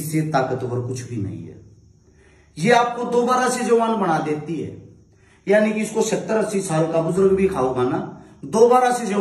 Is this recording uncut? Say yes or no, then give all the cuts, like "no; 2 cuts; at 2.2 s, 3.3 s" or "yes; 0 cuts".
yes; 0 cuts